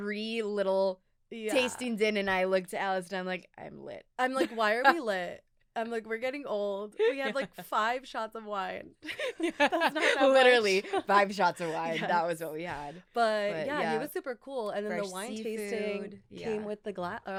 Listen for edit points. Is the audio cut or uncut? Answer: uncut